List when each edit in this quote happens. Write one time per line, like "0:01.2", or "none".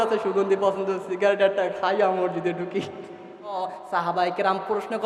0:03.5